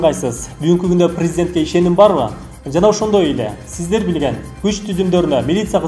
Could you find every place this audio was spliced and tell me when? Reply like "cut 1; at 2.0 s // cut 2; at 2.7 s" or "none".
none